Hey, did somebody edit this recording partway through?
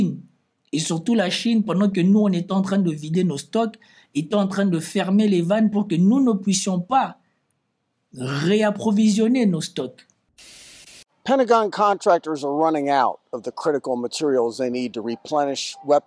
yes; 1 cut; at 10.6 s

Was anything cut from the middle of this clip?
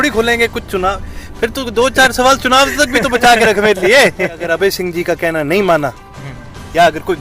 yes; 1 cut; at 4.4 s

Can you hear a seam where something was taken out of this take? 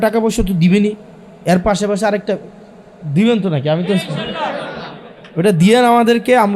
no; 0 cuts

